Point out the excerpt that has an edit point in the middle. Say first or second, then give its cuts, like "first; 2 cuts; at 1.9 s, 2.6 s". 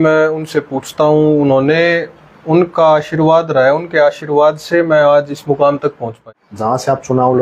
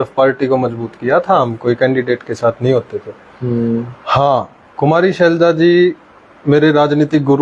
first; 1 cut; at 6.2 s